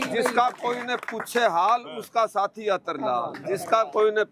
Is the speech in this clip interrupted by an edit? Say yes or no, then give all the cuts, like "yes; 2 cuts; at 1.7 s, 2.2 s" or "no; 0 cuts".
no; 0 cuts